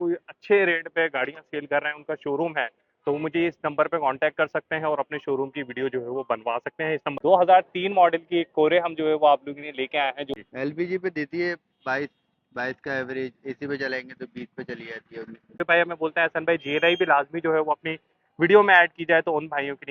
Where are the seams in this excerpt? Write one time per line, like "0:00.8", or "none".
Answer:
0:07.1
0:10.3
0:15.6